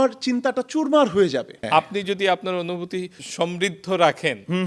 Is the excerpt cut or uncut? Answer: cut